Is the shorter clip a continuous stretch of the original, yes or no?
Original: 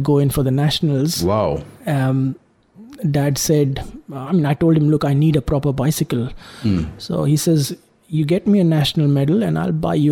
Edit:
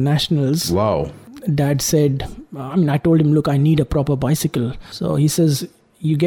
no